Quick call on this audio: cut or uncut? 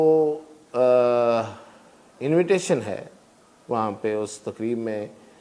uncut